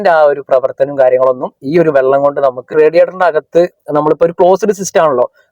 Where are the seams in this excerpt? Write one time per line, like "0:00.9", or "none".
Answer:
0:02.8